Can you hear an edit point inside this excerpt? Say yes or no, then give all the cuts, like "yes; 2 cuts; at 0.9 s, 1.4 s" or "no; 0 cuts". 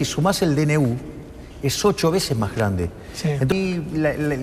yes; 1 cut; at 3.5 s